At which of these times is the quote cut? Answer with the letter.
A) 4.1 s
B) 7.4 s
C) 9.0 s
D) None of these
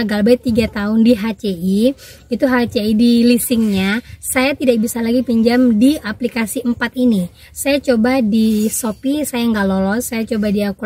D